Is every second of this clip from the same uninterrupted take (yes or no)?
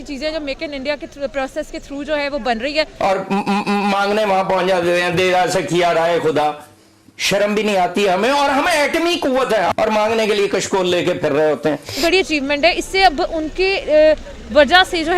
no